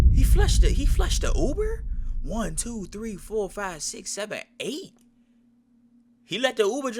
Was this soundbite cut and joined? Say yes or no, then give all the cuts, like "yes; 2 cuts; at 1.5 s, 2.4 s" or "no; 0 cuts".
no; 0 cuts